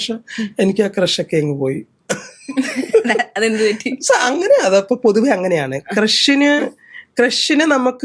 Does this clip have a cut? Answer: no; 0 cuts

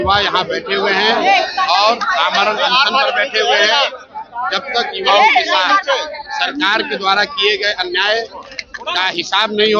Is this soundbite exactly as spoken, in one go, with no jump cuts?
yes; 0 cuts

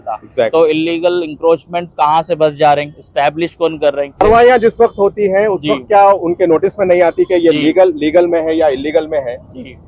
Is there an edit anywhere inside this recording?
yes; 1 cut; at 4.2 s

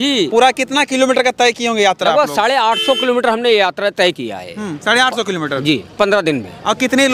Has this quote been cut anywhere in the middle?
no; 0 cuts

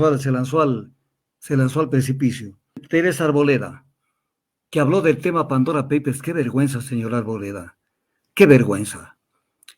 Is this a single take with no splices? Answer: no; 1 cut; at 2.8 s

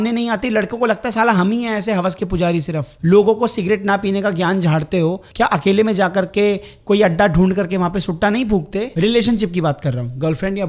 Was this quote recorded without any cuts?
no; 3 cuts; at 2.8 s, 5.2 s, 8.9 s

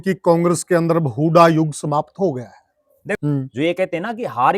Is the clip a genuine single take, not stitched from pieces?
no; 1 cut; at 3.2 s

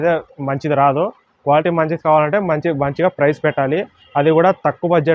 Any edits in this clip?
no; 0 cuts

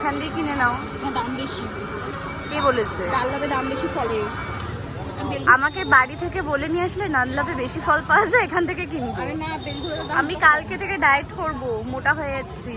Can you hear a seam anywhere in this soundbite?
no; 0 cuts

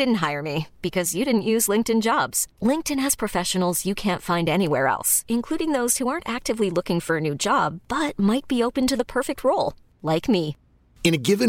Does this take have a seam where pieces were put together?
no; 0 cuts

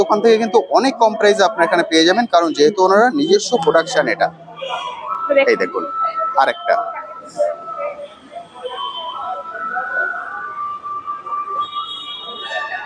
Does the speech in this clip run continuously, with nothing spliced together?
yes; 0 cuts

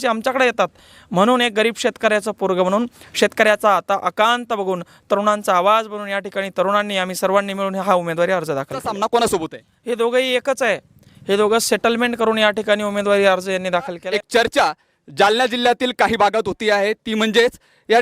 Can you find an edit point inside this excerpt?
yes; 2 cuts; at 8.9 s, 14.0 s

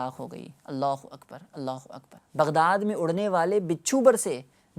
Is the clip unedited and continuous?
yes; 0 cuts

